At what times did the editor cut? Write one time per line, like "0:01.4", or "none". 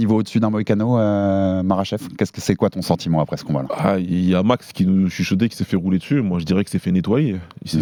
none